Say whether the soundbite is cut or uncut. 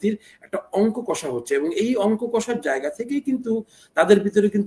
uncut